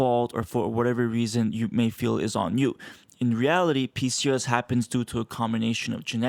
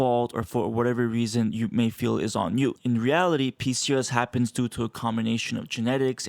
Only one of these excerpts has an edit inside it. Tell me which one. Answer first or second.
second